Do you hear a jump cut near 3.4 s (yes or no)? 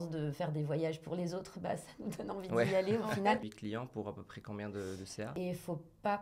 yes